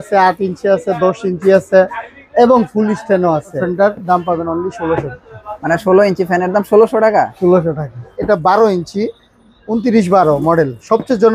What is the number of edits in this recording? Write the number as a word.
two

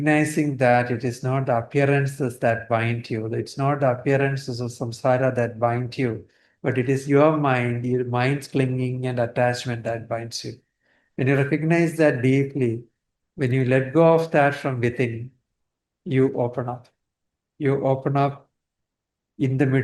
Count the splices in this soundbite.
zero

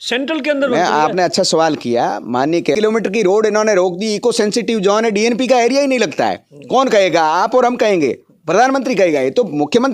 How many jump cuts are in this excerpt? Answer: one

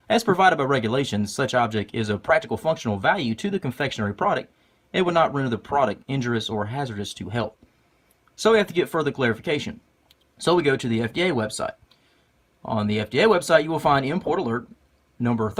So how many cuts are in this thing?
zero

